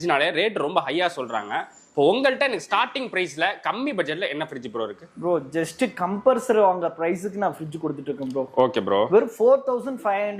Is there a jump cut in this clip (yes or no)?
no